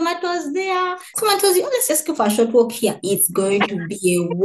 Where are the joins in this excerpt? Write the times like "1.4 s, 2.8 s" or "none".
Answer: 1.1 s